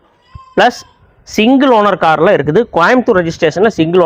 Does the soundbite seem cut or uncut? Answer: uncut